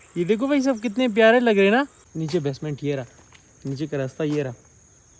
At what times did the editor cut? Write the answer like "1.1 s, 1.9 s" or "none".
2.0 s